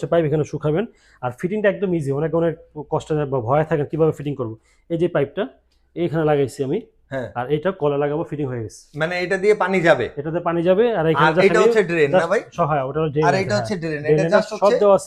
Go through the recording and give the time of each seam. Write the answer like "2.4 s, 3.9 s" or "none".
none

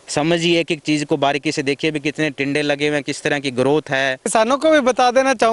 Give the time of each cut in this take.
4.3 s

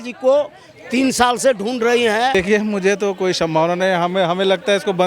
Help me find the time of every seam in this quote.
2.4 s

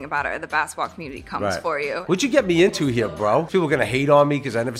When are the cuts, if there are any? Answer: 2.0 s, 3.5 s

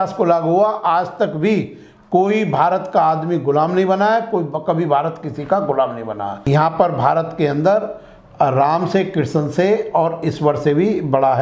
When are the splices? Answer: 6.3 s

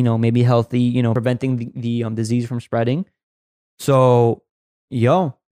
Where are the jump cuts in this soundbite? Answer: 1.2 s

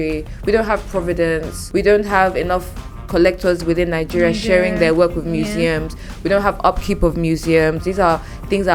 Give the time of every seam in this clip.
1.5 s

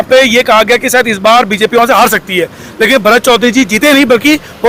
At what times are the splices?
none

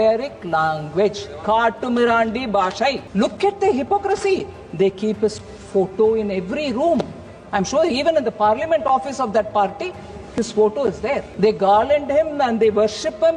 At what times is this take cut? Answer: 3.0 s, 11.3 s

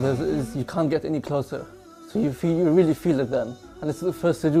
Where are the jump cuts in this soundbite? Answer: none

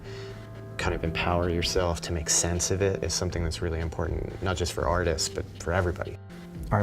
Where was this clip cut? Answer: 5.3 s

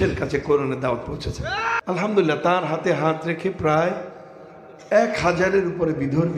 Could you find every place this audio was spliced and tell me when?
1.8 s

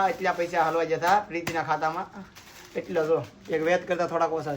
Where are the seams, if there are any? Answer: none

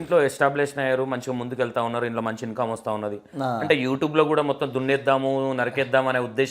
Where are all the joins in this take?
none

